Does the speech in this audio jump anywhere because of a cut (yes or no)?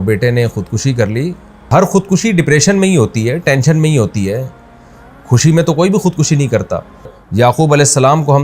yes